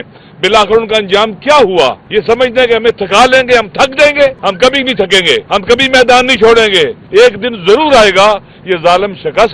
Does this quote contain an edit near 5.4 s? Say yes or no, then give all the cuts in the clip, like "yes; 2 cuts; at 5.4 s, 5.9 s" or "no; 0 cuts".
yes; 4 cuts; at 2.0 s, 4.4 s, 5.4 s, 7.0 s